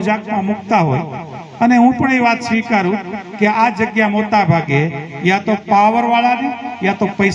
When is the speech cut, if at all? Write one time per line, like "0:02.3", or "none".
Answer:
none